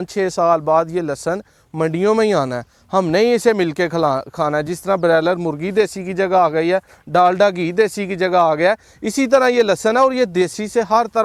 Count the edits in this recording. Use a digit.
0